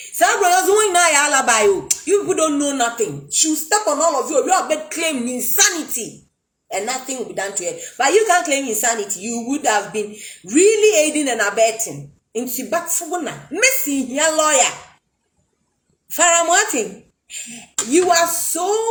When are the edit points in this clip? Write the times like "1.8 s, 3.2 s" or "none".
none

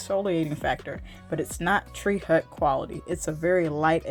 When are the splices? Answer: none

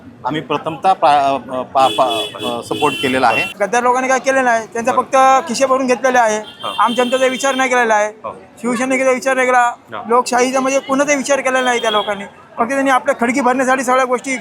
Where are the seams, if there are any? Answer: 3.5 s

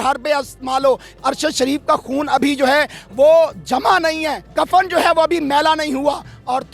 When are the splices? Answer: 1.1 s, 4.4 s

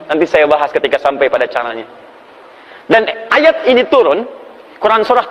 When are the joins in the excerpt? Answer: none

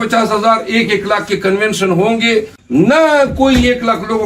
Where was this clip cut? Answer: 2.6 s

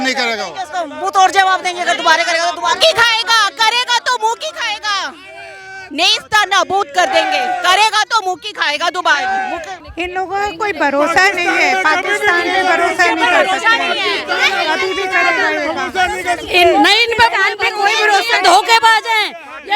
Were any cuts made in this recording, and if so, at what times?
9.8 s

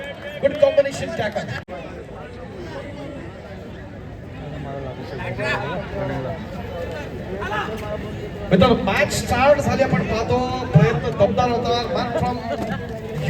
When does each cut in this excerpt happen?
1.6 s

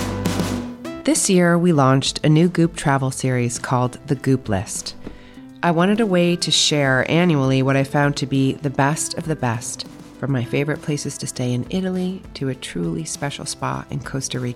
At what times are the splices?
1.0 s

